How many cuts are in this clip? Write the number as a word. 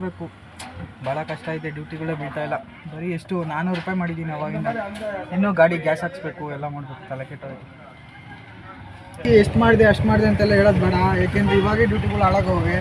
one